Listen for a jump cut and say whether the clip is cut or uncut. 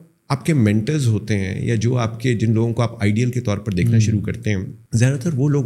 cut